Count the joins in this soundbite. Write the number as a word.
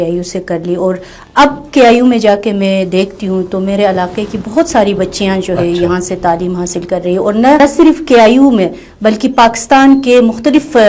zero